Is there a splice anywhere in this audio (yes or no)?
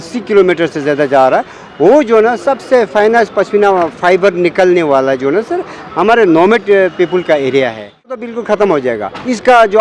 yes